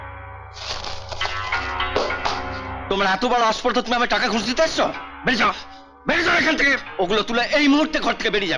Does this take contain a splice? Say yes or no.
yes